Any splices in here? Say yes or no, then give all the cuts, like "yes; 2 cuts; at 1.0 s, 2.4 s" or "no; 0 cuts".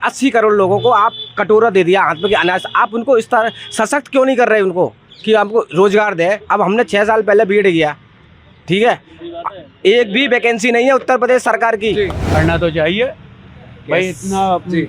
yes; 1 cut; at 12.4 s